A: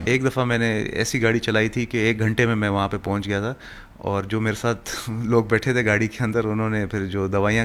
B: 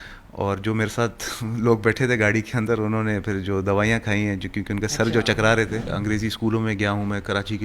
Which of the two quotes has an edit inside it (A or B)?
B